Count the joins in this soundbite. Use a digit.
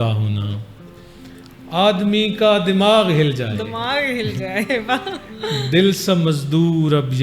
0